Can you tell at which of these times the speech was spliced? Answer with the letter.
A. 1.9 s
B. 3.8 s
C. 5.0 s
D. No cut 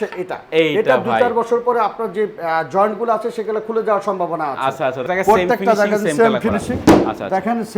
C